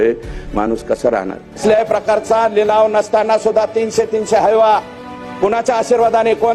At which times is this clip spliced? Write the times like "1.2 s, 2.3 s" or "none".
1.6 s